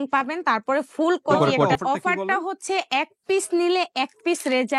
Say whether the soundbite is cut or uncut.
cut